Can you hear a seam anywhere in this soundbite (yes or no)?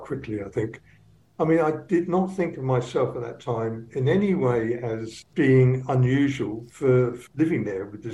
yes